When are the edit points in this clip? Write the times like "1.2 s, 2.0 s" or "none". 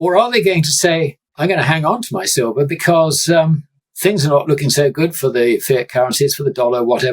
1.2 s